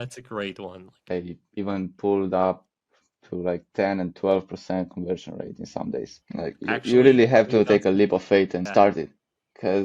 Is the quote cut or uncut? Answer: cut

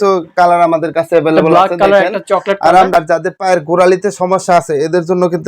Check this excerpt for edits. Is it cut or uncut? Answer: cut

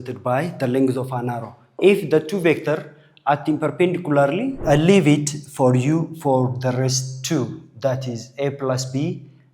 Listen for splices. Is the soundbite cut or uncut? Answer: cut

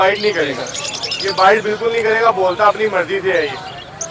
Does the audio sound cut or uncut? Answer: uncut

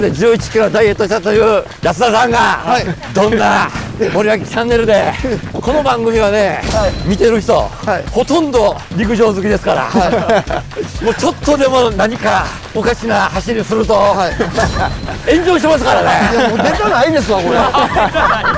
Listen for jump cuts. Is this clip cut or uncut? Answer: cut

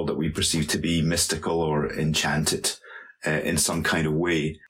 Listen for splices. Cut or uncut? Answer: uncut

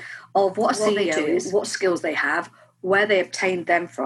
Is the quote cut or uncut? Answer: cut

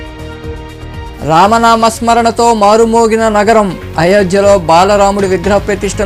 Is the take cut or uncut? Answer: uncut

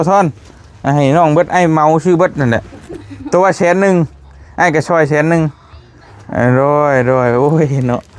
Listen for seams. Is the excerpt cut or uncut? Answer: uncut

